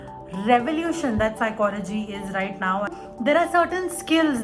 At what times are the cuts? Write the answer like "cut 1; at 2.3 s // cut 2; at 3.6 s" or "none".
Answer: cut 1; at 3.0 s